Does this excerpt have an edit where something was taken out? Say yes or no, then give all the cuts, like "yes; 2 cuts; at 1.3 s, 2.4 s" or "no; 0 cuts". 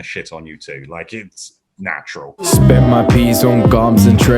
yes; 1 cut; at 2.4 s